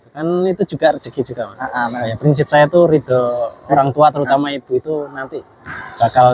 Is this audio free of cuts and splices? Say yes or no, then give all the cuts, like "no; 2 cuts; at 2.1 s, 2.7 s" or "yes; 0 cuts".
no; 1 cut; at 2.0 s